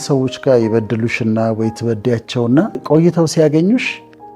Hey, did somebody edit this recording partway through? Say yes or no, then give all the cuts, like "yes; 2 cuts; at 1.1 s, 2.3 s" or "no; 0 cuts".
yes; 1 cut; at 2.8 s